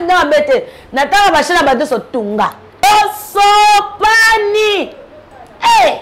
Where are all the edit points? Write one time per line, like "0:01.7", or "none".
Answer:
0:02.8